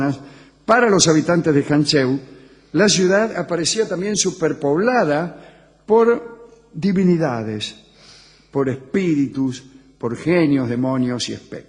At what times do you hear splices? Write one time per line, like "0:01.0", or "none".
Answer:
0:05.3